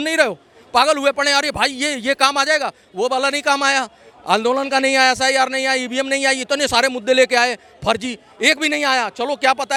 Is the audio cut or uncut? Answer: uncut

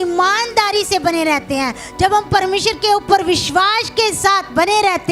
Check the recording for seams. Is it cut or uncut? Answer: uncut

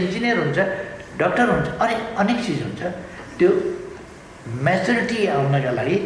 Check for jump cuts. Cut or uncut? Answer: uncut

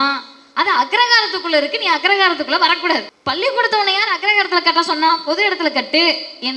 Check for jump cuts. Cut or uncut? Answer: cut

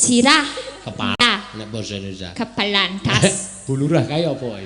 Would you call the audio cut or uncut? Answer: cut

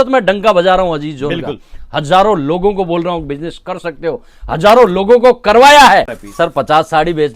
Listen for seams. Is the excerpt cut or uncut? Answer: cut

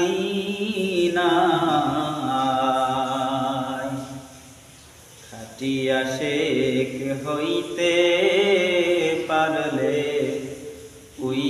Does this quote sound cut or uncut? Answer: uncut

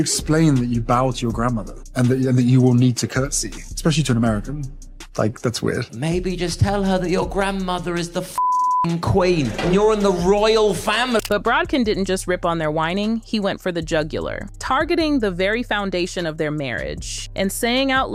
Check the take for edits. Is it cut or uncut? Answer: uncut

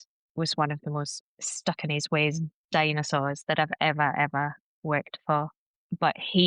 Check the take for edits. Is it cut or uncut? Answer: cut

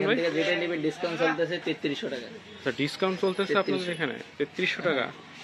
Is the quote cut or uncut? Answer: uncut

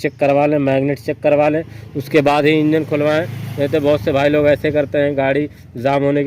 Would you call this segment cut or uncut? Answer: uncut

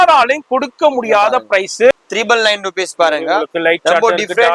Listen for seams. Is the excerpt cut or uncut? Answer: cut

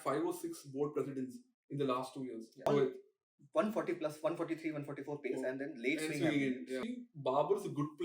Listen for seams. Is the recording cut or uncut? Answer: cut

